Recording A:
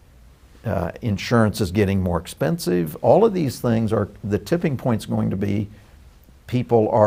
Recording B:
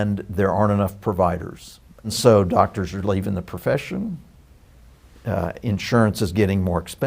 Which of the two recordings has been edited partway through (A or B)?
B